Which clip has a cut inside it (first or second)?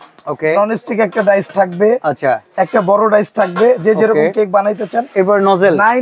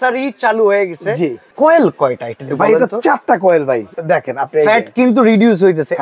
second